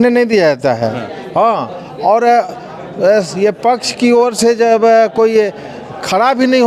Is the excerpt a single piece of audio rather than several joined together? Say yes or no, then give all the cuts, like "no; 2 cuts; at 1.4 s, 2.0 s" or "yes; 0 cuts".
yes; 0 cuts